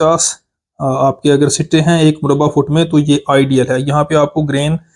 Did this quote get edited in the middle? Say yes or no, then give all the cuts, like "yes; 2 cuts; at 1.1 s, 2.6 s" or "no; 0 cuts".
no; 0 cuts